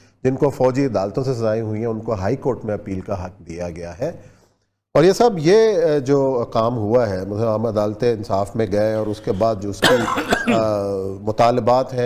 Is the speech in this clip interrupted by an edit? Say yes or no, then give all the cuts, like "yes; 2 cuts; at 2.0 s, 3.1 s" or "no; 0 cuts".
no; 0 cuts